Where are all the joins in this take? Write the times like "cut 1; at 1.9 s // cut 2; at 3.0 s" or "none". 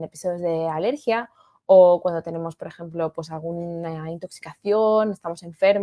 none